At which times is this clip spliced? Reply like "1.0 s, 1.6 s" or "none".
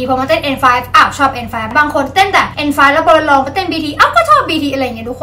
1.7 s, 2.5 s